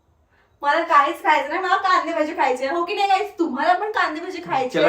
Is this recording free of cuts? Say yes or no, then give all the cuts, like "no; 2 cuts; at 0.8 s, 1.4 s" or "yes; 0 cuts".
yes; 0 cuts